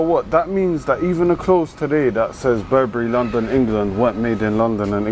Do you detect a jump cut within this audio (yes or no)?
no